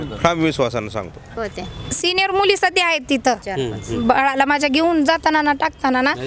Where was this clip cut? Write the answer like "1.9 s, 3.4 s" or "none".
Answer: 1.5 s

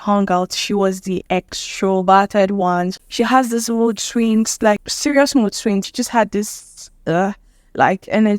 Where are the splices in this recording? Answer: 1.2 s, 3.0 s, 4.9 s, 5.8 s

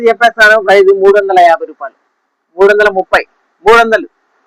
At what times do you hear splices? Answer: none

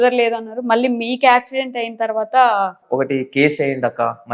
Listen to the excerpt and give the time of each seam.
2.8 s

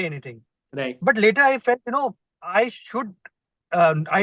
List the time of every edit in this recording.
none

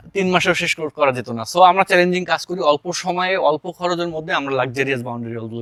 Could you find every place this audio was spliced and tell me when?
none

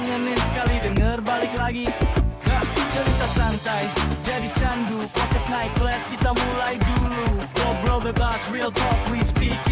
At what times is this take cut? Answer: none

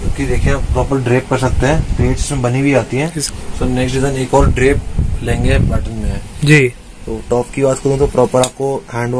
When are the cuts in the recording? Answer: 3.2 s

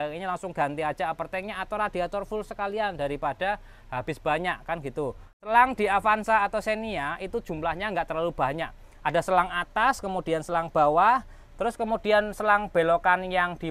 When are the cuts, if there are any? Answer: 5.3 s

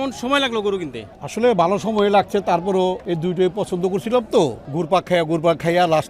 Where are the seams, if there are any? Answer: 3.0 s, 4.7 s

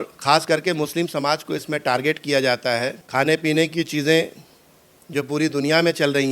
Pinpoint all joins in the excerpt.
none

